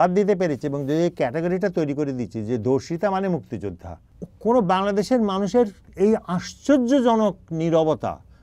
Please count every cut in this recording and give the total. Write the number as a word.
one